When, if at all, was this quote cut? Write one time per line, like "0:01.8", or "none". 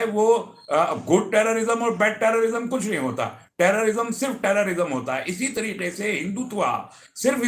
none